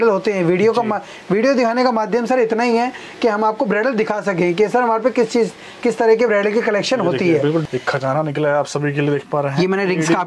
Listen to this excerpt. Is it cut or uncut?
cut